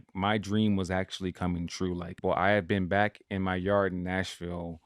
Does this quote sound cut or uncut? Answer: cut